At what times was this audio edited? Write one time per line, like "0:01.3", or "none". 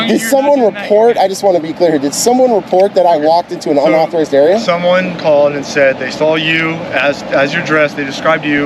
none